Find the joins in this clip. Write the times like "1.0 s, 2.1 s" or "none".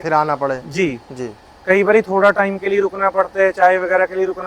none